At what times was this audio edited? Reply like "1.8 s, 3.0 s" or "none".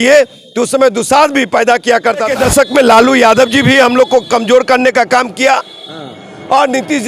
2.3 s